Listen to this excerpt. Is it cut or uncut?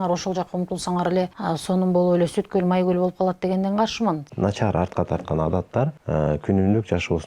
cut